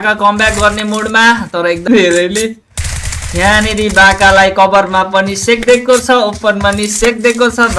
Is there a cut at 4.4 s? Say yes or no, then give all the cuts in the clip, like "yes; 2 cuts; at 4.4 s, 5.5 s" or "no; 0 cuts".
no; 1 cut; at 1.9 s